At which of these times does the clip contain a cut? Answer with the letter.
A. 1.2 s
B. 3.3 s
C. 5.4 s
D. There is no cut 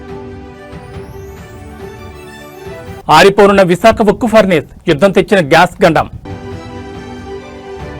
A